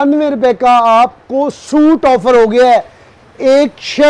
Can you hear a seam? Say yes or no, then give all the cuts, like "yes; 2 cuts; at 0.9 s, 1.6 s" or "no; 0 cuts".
no; 0 cuts